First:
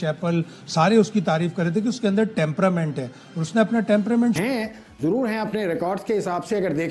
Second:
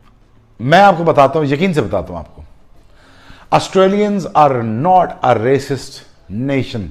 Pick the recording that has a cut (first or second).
first